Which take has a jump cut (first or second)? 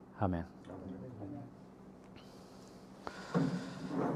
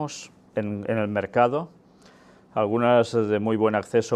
second